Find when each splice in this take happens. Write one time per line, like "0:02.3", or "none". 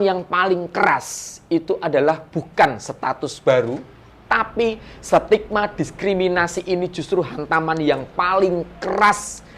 0:04.3